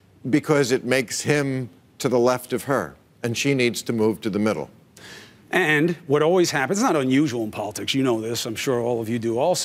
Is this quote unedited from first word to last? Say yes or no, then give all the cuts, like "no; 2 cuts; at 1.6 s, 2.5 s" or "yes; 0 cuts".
no; 1 cut; at 5.5 s